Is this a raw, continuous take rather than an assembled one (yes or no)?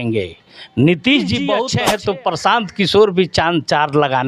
no